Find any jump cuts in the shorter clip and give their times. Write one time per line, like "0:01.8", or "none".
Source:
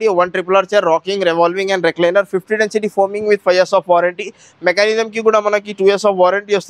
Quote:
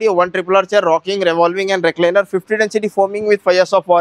none